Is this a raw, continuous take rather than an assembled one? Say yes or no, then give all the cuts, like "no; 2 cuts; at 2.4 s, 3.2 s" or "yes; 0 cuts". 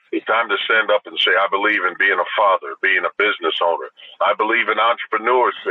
yes; 0 cuts